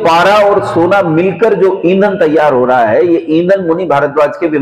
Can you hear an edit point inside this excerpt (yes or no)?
no